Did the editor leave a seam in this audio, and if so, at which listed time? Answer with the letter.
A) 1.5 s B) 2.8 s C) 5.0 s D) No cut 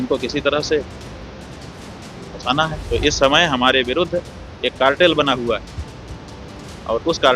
B